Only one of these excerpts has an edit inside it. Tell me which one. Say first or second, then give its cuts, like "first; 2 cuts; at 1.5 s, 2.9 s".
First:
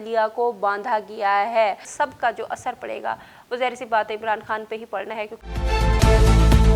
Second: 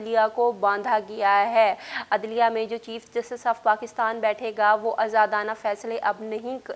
first; 2 cuts; at 1.9 s, 5.3 s